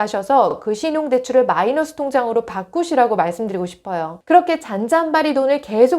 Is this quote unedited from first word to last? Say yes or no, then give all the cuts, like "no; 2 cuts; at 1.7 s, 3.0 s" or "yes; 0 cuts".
no; 1 cut; at 4.1 s